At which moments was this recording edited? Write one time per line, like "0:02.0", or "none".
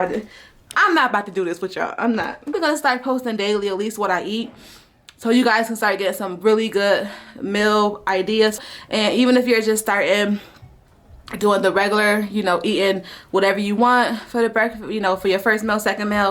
0:02.5
0:08.6